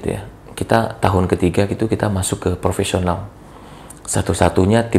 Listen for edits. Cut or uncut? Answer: uncut